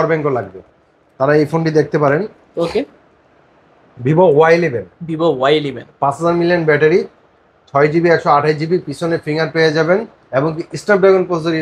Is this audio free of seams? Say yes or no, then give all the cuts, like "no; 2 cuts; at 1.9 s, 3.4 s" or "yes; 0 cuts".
yes; 0 cuts